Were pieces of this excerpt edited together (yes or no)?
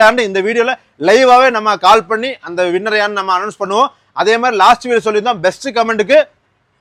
no